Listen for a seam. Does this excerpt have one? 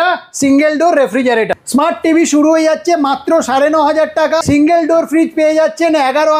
yes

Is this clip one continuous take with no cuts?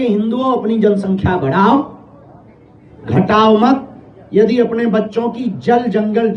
yes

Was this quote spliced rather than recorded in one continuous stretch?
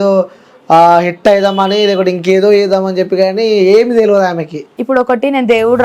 yes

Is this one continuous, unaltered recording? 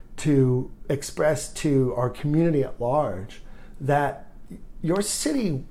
yes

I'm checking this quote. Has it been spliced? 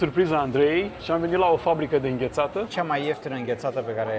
yes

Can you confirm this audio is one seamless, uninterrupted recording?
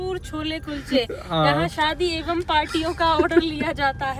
yes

